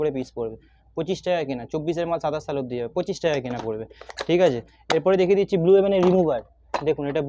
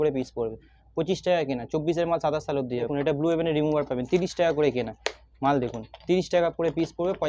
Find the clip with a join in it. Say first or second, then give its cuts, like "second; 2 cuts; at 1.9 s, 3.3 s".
second; 1 cut; at 2.9 s